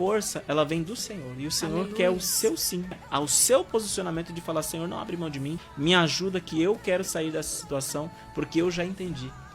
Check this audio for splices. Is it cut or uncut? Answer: cut